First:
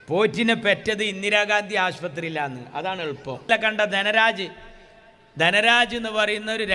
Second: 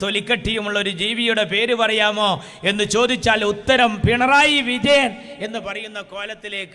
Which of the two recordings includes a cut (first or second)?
first